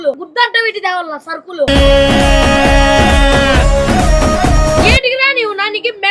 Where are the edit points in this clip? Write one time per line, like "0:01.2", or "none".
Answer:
0:04.9